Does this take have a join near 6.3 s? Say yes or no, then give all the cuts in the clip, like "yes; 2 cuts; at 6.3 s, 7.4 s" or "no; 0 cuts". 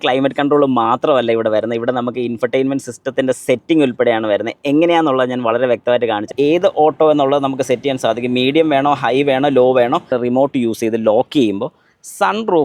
yes; 2 cuts; at 6.3 s, 10.1 s